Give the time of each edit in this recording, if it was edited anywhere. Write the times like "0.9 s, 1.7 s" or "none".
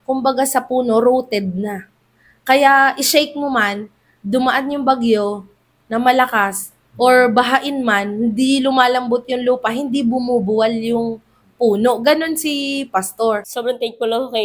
13.5 s